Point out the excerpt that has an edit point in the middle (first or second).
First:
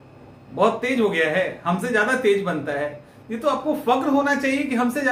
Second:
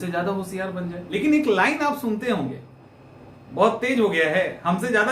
second